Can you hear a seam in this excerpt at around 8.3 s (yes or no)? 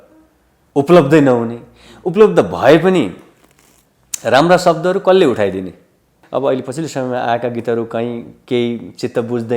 no